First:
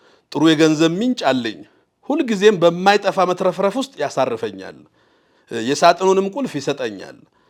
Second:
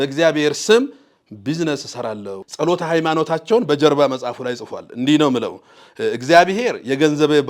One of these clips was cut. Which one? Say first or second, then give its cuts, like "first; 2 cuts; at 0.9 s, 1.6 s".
second; 1 cut; at 2.4 s